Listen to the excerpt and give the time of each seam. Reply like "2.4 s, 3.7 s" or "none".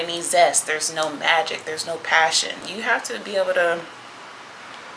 2.7 s